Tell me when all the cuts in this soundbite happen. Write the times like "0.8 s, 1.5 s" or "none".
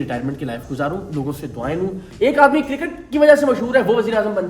2.0 s